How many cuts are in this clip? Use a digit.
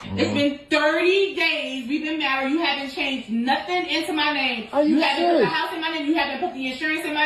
0